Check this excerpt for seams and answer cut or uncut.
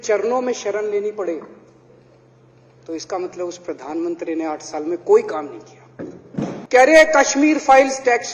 cut